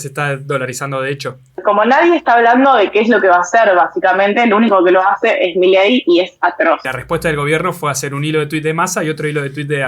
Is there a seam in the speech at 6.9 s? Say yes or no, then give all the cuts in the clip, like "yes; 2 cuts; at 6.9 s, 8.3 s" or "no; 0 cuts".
yes; 2 cuts; at 1.6 s, 6.9 s